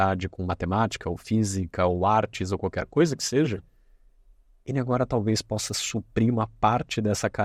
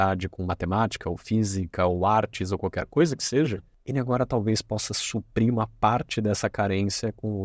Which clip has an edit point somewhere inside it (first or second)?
second